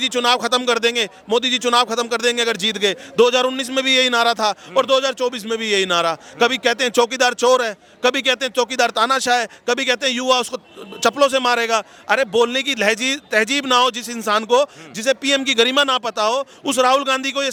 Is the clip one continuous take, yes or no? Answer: yes